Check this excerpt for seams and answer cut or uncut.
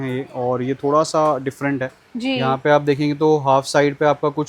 uncut